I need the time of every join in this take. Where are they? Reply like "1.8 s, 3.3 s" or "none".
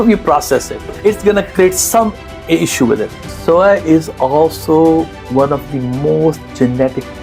0.9 s, 3.2 s